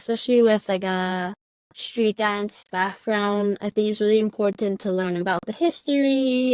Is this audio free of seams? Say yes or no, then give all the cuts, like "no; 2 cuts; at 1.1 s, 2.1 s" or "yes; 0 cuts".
yes; 0 cuts